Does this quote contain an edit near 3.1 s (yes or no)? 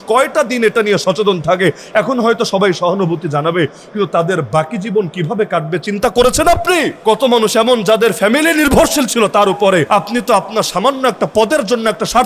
no